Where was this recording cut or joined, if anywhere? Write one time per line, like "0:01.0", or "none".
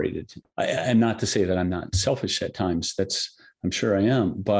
none